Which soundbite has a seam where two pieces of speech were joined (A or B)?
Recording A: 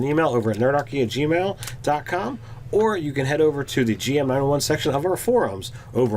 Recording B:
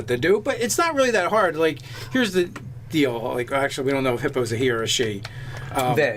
A